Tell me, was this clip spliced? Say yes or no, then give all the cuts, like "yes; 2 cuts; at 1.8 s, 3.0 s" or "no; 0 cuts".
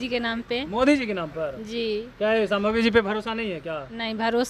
no; 0 cuts